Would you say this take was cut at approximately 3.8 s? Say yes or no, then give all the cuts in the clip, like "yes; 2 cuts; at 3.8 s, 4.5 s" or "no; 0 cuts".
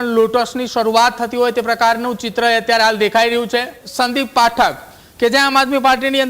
yes; 1 cut; at 3.8 s